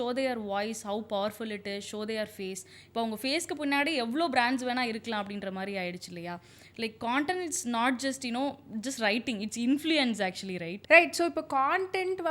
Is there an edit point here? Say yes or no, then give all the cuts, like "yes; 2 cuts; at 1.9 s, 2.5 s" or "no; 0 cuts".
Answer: no; 0 cuts